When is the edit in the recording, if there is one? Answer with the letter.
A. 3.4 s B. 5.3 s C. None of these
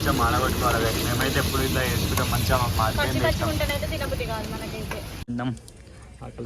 B